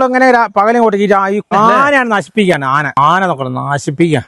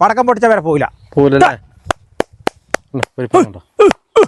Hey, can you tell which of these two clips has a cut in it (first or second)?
first